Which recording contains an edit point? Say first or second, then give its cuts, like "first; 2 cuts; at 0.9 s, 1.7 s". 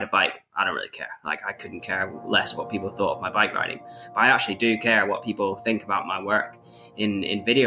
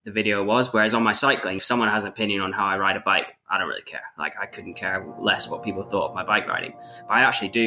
second; 1 cut; at 1.6 s